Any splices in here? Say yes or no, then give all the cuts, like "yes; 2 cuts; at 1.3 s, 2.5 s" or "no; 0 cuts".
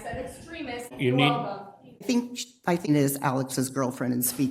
yes; 3 cuts; at 0.9 s, 2.0 s, 2.9 s